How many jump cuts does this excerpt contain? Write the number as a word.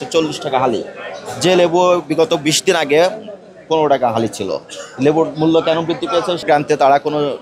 one